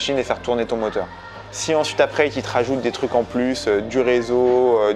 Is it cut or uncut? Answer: uncut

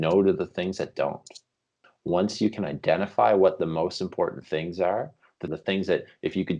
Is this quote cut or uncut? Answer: cut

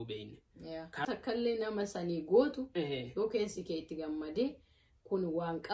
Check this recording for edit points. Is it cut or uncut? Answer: cut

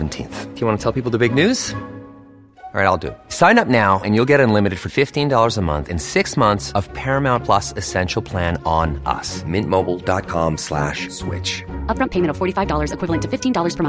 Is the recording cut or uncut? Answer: uncut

